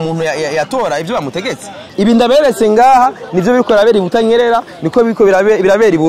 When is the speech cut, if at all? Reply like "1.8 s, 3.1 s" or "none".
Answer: 1.8 s